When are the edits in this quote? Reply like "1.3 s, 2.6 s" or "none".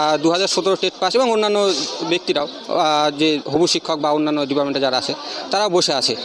none